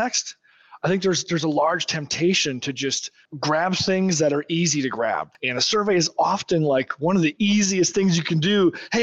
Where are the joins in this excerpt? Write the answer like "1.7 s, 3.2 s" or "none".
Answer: 3.2 s, 5.3 s